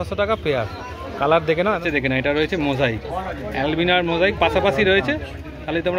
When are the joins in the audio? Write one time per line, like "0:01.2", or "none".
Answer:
0:01.8